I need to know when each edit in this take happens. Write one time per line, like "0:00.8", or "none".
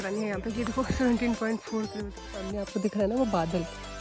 0:02.5